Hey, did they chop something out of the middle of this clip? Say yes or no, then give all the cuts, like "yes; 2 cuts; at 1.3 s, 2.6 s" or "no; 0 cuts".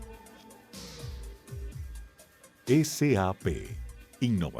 yes; 1 cut; at 1.6 s